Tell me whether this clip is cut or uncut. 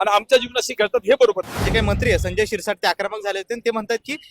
cut